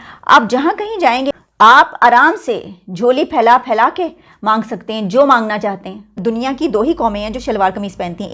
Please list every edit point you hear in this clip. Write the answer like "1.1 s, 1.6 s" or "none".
1.4 s, 6.1 s